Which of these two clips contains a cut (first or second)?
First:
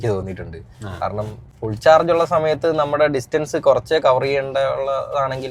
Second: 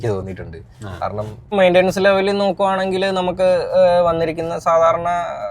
second